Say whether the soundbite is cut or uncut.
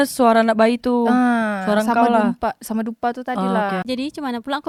uncut